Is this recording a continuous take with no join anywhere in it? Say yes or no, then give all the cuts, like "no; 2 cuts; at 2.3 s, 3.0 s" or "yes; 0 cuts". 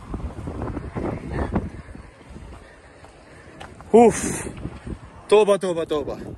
yes; 0 cuts